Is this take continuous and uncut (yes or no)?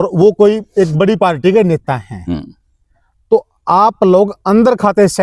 yes